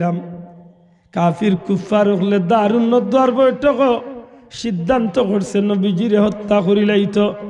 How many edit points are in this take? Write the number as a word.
zero